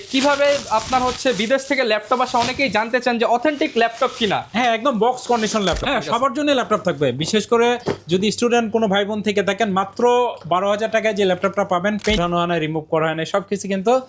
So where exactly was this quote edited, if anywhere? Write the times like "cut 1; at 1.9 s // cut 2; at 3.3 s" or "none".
cut 1; at 5.8 s // cut 2; at 12.2 s